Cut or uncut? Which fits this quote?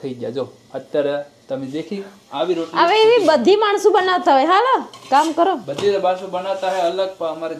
uncut